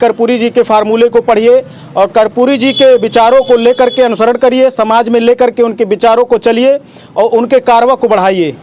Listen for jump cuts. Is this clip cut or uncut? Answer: uncut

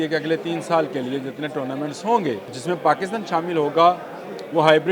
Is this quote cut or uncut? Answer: cut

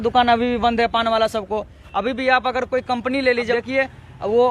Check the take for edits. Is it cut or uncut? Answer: cut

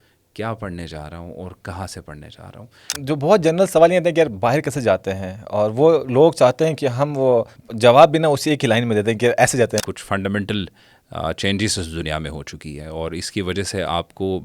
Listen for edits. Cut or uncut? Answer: cut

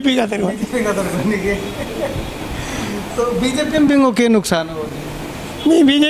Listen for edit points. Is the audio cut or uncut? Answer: uncut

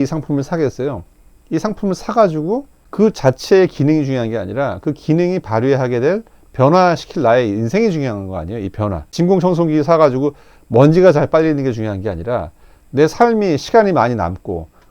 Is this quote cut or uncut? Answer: cut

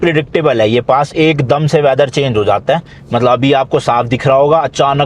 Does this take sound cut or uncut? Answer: uncut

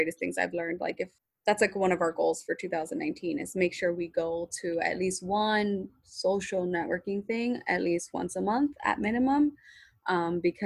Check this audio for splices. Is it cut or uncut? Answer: cut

